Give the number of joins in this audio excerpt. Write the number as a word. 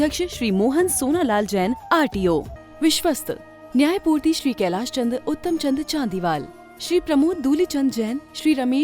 one